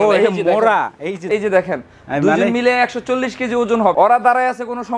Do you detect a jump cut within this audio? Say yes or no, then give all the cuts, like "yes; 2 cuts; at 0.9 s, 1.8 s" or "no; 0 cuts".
yes; 2 cuts; at 1.3 s, 3.9 s